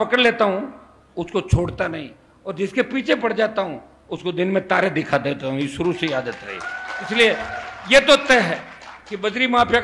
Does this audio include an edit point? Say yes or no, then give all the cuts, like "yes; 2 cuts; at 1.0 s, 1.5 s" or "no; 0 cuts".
no; 0 cuts